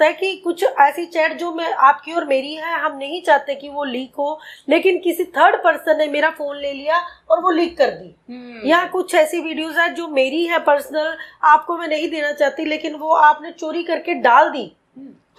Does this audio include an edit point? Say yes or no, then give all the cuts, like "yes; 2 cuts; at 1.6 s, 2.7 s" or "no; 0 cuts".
no; 0 cuts